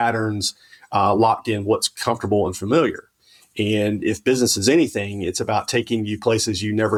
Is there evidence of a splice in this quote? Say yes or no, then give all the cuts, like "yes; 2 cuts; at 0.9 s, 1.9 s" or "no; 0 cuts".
no; 0 cuts